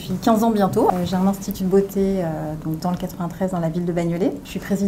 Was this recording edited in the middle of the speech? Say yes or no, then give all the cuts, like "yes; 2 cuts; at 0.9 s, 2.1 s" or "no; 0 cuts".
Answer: yes; 1 cut; at 0.9 s